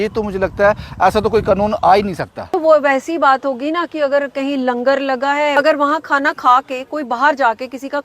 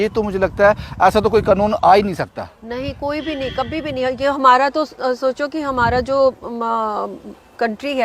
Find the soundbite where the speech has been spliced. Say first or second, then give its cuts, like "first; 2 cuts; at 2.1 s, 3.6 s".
first; 2 cuts; at 2.5 s, 5.6 s